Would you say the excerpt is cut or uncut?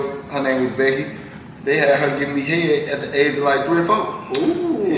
uncut